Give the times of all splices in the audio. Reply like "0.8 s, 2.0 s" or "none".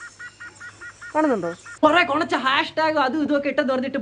1.8 s